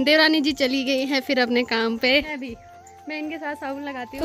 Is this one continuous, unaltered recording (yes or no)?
yes